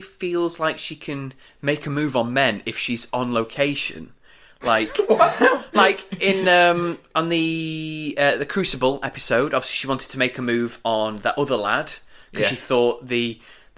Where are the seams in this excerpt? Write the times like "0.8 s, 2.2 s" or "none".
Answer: none